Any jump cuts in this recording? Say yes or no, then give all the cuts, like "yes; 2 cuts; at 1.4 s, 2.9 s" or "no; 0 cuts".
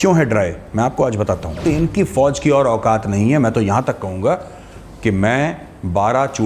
yes; 1 cut; at 1.6 s